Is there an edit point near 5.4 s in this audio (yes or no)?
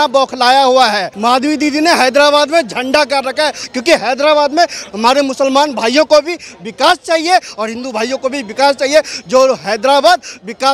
no